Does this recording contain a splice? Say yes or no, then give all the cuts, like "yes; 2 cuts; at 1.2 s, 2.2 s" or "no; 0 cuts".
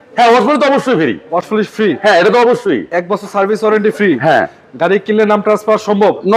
no; 0 cuts